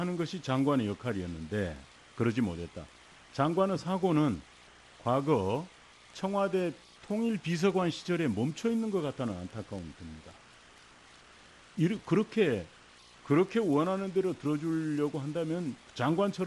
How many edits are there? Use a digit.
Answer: 1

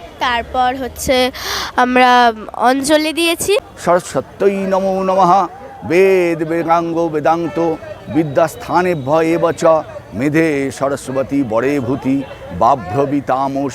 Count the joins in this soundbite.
1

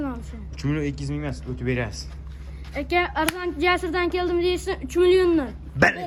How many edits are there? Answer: 0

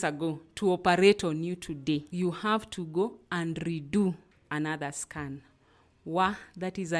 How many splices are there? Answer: 1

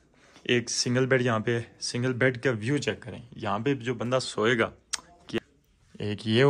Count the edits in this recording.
1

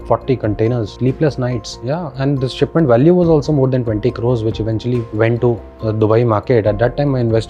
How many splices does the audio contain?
0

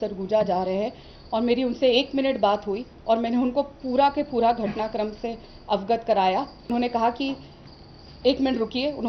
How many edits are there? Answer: 1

